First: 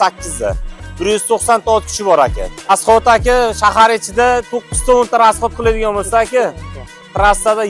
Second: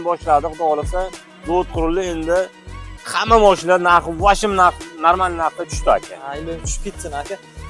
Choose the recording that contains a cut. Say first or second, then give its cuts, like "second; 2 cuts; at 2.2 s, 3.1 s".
first; 1 cut; at 2.7 s